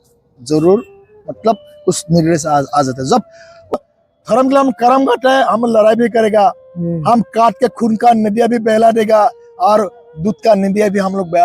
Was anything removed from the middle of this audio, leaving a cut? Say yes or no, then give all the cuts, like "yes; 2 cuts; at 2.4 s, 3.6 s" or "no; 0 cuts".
yes; 1 cut; at 3.7 s